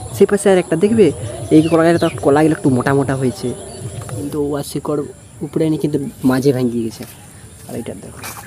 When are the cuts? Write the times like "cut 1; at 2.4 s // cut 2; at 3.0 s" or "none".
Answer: cut 1; at 4.3 s